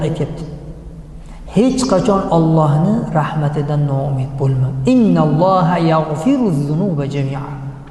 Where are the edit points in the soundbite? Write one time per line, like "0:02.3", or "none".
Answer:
none